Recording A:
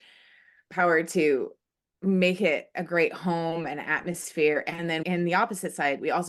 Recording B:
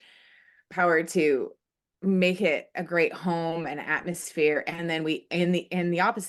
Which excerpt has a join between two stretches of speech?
A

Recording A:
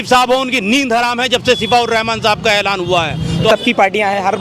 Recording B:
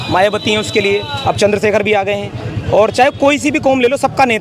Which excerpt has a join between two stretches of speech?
A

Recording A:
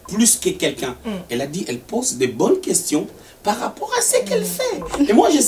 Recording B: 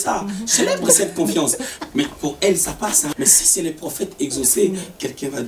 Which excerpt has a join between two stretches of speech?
B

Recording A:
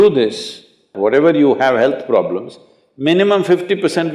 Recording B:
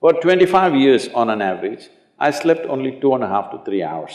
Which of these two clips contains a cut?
A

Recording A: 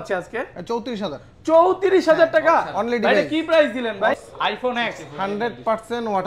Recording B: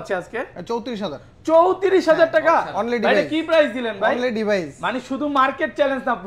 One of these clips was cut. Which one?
A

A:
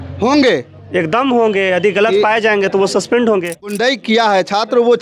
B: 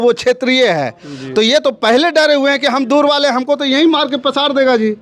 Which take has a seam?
A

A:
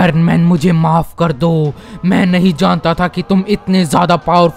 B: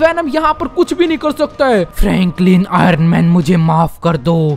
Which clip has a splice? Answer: B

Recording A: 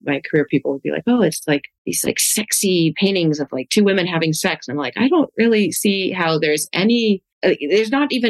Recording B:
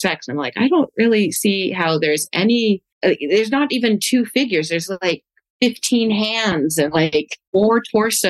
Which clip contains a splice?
B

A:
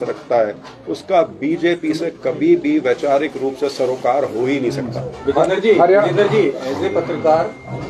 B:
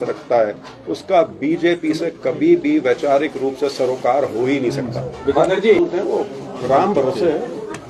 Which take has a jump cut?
B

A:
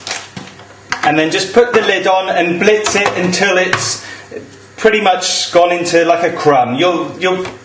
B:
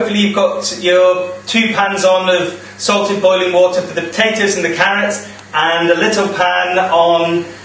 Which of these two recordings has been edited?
A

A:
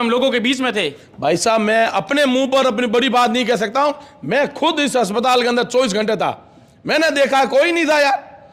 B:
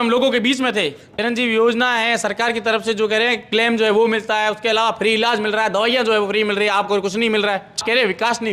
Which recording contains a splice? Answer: B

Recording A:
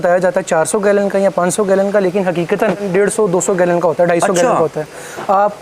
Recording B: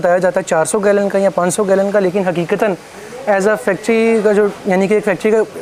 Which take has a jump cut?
A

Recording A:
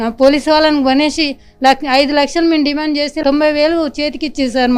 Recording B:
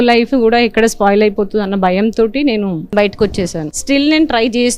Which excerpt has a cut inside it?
B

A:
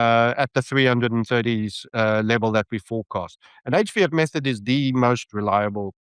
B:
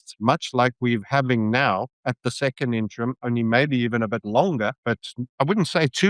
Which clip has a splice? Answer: B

